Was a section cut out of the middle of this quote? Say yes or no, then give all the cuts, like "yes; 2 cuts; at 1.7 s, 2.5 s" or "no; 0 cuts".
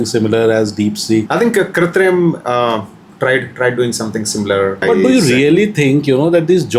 yes; 2 cuts; at 1.3 s, 4.8 s